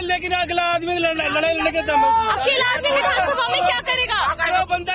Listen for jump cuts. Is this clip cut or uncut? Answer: uncut